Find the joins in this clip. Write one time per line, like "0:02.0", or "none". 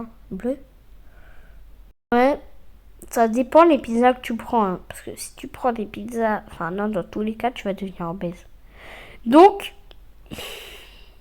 0:01.5